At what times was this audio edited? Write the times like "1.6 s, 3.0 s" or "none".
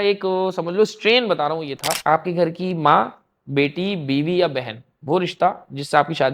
1.9 s